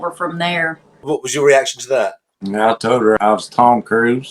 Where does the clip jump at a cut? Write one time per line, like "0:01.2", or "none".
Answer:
0:01.0
0:03.2